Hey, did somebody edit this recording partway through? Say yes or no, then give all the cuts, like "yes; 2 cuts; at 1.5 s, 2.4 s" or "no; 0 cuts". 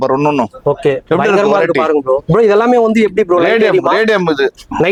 no; 0 cuts